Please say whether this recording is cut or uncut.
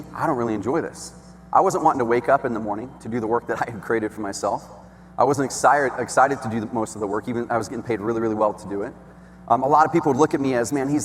uncut